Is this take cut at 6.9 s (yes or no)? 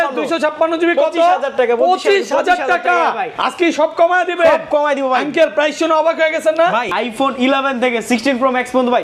yes